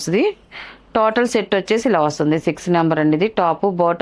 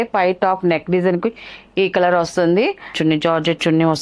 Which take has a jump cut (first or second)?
second